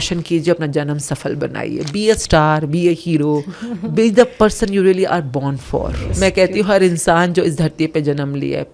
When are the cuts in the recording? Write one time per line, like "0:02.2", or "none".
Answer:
0:06.0